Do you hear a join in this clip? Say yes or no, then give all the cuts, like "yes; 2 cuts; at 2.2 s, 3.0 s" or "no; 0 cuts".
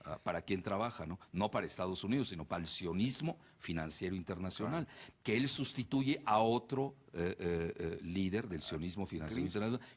yes; 1 cut; at 5.4 s